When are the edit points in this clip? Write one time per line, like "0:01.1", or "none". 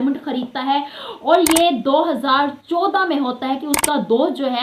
none